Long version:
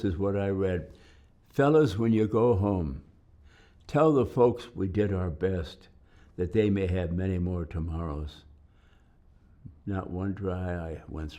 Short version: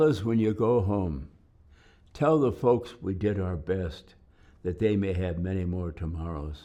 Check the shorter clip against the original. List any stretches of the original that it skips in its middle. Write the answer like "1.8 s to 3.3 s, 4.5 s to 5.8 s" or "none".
none